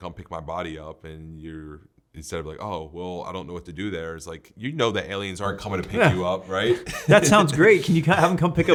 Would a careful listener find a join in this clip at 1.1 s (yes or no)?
no